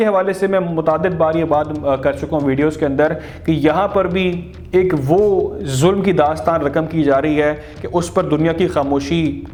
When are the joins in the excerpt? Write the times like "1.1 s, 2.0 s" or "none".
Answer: none